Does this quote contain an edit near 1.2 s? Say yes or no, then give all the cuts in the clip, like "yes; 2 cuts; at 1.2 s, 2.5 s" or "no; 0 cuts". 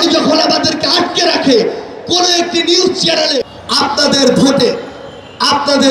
no; 1 cut; at 3.4 s